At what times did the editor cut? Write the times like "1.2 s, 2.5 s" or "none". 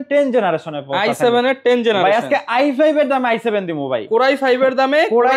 none